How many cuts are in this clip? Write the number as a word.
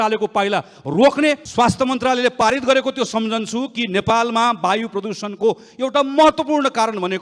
one